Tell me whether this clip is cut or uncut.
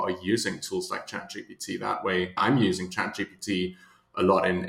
cut